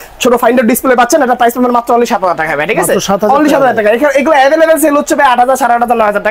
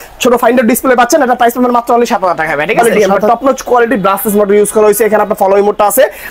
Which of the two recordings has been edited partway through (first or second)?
second